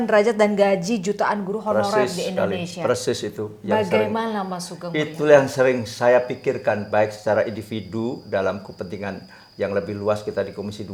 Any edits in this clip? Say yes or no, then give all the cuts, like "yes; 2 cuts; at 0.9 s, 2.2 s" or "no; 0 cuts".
no; 0 cuts